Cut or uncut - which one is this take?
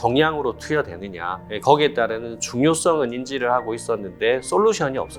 uncut